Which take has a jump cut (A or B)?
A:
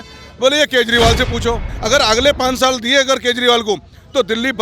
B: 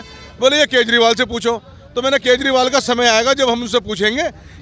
A